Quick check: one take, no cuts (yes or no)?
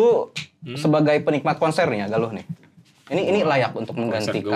yes